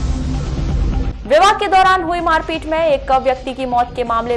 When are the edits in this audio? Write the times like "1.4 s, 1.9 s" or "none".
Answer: 1.0 s